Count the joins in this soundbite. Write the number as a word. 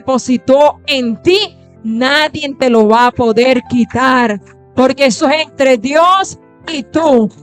zero